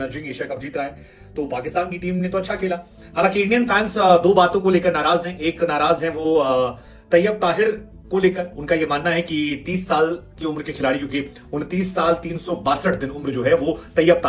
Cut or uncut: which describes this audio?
uncut